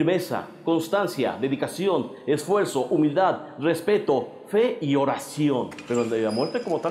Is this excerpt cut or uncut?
cut